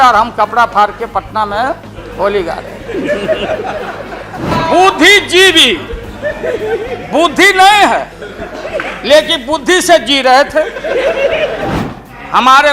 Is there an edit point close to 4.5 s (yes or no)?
yes